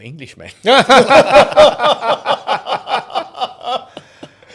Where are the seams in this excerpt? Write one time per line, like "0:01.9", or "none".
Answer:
none